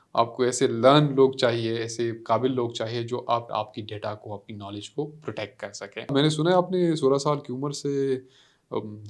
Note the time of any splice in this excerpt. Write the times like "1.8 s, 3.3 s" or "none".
3.5 s, 6.1 s